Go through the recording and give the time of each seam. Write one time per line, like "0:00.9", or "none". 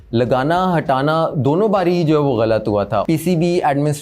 0:03.0